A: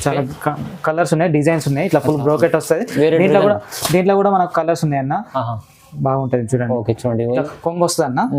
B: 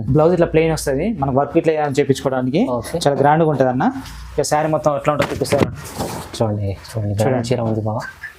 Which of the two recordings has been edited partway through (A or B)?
A